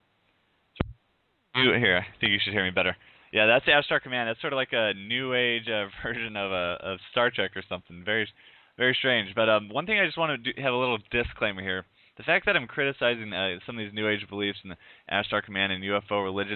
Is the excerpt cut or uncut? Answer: uncut